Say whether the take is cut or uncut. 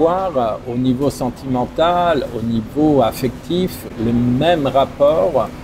uncut